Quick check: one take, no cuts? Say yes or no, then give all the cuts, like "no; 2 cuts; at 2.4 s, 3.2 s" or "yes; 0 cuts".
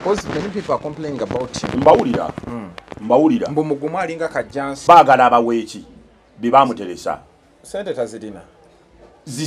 no; 1 cut; at 4.8 s